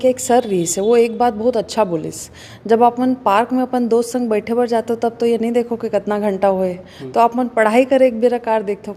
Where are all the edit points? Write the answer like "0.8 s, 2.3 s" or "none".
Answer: none